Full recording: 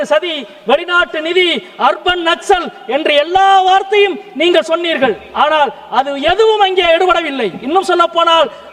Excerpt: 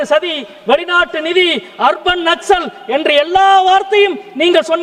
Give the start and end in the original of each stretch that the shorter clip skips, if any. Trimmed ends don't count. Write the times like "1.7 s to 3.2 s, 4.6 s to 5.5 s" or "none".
none